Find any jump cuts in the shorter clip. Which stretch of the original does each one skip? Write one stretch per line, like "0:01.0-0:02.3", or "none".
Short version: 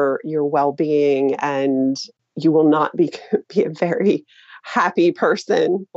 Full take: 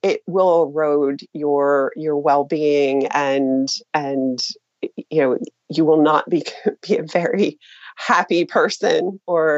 0:03.8-0:05.5